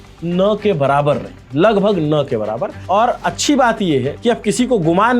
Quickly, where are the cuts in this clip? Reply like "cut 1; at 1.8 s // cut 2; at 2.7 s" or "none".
cut 1; at 2.8 s // cut 2; at 4.1 s